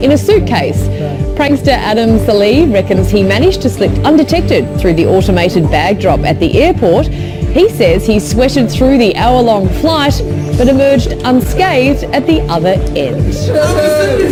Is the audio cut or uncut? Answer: uncut